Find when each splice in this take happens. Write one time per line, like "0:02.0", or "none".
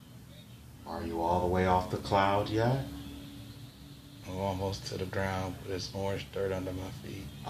0:01.3